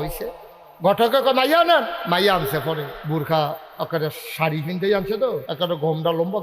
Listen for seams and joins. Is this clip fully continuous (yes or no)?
no